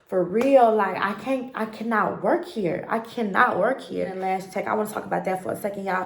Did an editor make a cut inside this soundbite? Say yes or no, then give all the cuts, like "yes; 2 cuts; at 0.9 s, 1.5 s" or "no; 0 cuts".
yes; 1 cut; at 4.1 s